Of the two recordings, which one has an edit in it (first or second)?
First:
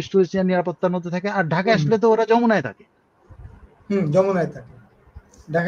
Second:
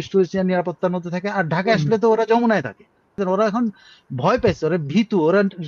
second